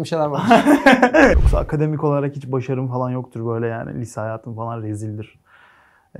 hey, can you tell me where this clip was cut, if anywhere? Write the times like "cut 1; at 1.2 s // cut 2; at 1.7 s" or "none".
cut 1; at 1.4 s